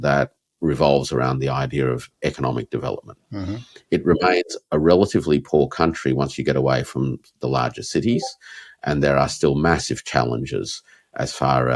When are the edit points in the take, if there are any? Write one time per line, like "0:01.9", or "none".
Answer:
none